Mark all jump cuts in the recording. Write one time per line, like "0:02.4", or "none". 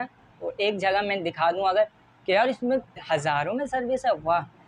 0:03.0